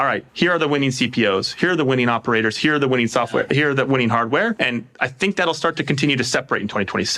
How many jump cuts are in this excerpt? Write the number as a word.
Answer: one